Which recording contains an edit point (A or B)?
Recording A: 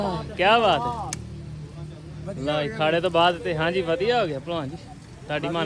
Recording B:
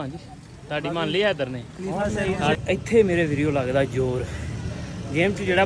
B